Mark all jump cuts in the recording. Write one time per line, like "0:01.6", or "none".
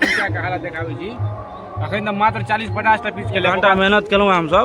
0:03.1